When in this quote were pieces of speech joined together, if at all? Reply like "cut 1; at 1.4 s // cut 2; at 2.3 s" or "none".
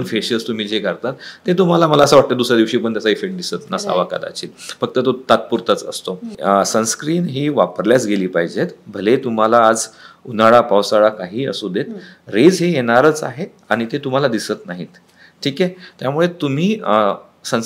cut 1; at 6.3 s